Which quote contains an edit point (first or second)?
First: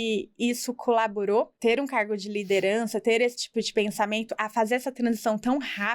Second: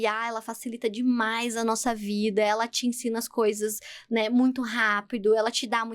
first